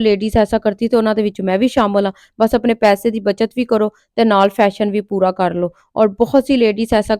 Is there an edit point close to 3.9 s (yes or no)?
no